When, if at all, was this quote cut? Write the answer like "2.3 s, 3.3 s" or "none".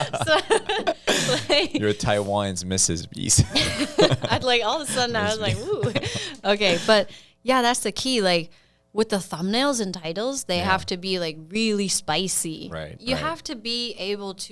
none